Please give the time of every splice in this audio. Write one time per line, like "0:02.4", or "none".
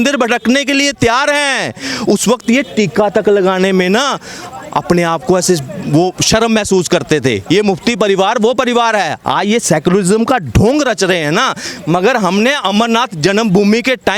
none

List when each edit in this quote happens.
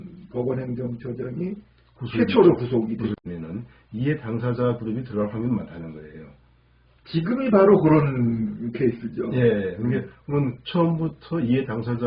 0:03.2

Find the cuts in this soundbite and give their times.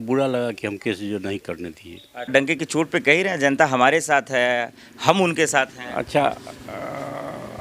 0:02.3

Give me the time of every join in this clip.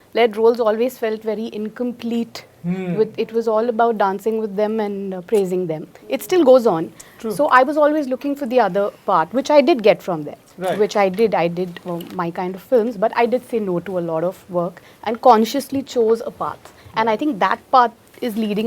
none

